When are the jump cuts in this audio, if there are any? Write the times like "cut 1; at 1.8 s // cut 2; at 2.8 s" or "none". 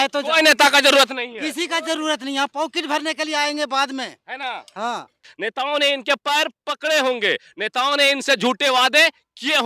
cut 1; at 5.3 s

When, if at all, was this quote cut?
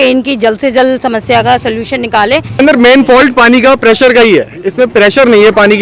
cut 1; at 2.6 s

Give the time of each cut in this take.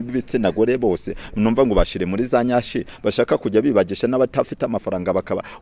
none

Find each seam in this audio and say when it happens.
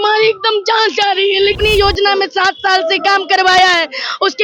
cut 1; at 1.6 s

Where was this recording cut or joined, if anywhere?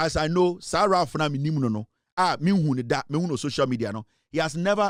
none

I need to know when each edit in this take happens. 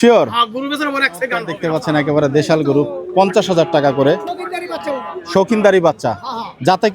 cut 1; at 1.5 s

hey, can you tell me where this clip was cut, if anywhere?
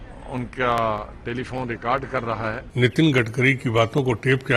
cut 1; at 2.6 s

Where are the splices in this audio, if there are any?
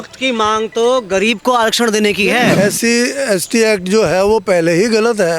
cut 1; at 2.6 s

